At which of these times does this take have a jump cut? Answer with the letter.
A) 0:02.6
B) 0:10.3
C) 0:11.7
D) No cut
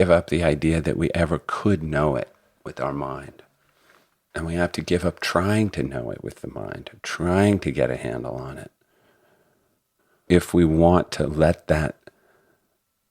B